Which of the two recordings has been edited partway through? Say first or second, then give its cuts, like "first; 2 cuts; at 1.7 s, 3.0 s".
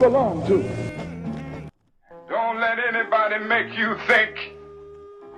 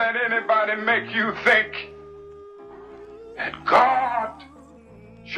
first; 1 cut; at 1.7 s